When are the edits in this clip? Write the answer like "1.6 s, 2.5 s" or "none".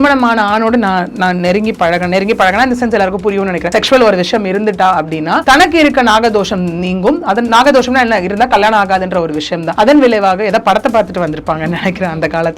3.6 s, 5.4 s, 9.6 s